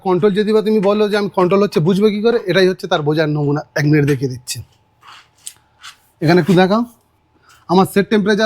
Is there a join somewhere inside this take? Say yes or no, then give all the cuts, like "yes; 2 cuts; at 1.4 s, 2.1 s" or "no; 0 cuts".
no; 0 cuts